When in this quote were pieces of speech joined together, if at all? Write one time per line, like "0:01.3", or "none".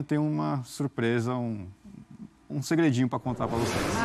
none